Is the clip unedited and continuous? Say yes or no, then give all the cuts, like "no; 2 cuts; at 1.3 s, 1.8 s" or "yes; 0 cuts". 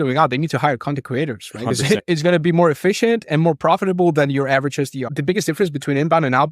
no; 1 cut; at 5.1 s